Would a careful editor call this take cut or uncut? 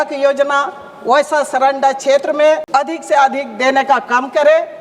cut